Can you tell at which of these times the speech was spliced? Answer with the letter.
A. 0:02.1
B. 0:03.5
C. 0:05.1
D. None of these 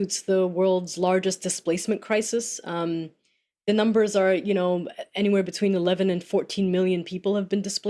D